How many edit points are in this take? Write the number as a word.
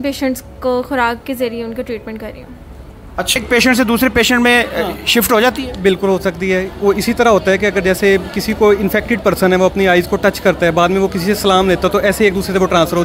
one